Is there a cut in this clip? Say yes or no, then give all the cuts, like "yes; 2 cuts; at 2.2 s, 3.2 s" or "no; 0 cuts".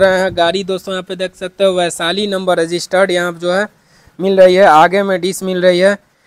no; 0 cuts